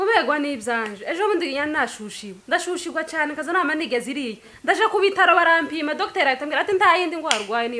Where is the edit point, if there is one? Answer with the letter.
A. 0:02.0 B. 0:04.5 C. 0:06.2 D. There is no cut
D